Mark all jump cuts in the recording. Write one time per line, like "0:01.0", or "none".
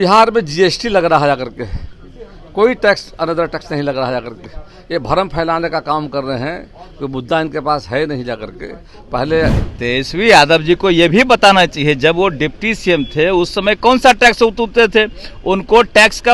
0:09.7